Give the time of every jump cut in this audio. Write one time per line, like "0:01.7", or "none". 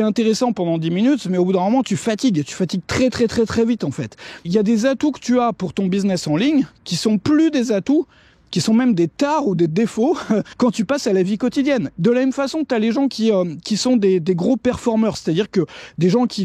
0:04.5
0:11.9

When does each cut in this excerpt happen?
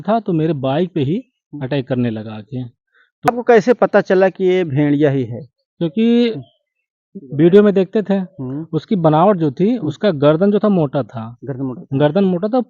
0:03.3

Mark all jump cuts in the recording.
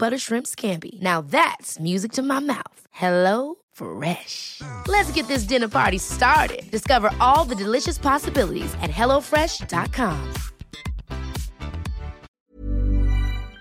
0:12.3

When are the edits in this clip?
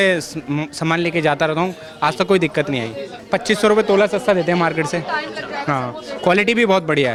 none

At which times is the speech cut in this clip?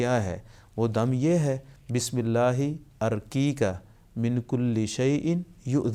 none

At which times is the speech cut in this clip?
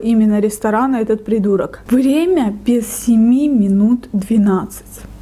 0:01.8

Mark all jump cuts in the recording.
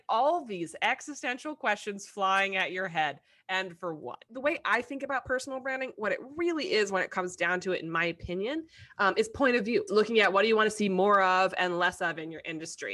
0:04.3
0:09.9

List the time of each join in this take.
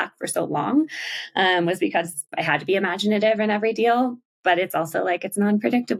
none

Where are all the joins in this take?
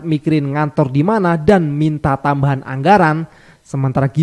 none

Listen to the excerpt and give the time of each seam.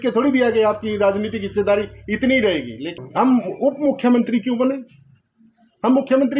0:02.8

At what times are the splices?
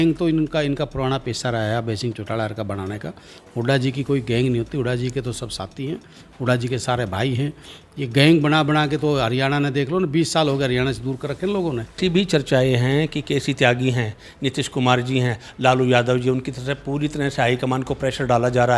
0:12.0

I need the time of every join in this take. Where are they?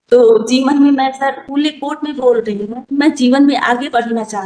0:01.0
0:03.2

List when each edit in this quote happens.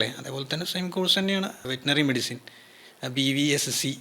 0:01.6

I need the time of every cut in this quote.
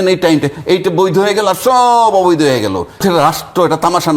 0:03.0

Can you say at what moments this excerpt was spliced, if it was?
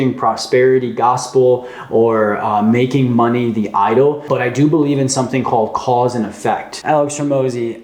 0:04.2
0:06.7

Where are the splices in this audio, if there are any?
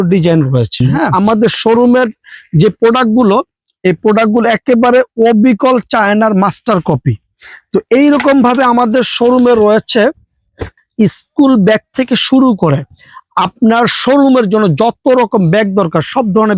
0:01.1

